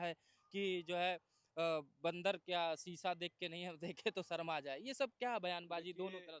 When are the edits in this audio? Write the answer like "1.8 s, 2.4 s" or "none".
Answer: none

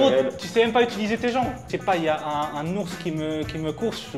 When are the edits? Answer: 1.6 s

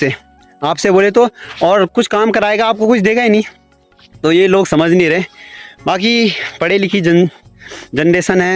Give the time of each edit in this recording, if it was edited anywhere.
none

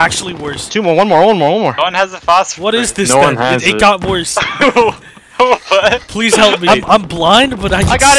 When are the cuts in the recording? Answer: 6.7 s

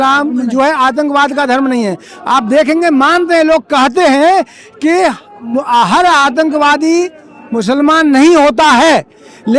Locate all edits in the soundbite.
none

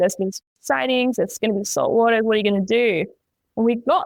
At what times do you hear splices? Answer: none

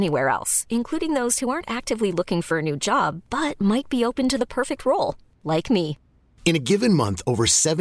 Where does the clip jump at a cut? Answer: none

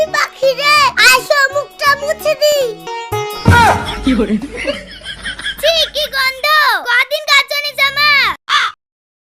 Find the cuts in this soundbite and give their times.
2.9 s, 8.4 s

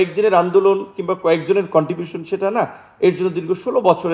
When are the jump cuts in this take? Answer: none

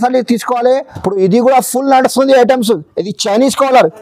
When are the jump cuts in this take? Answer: 0.9 s

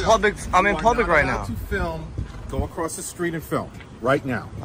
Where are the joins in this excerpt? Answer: none

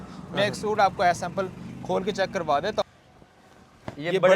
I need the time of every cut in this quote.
2.8 s

